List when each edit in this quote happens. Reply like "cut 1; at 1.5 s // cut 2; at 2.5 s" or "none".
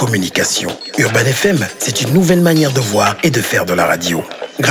none